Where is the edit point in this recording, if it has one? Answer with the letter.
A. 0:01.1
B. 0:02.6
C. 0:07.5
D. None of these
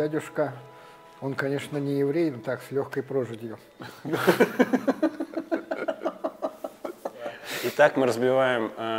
C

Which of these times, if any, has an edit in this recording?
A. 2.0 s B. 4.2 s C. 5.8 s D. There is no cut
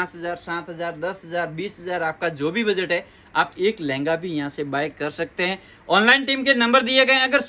D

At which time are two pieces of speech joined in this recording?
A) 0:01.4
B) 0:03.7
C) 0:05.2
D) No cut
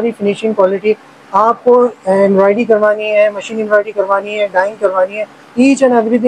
D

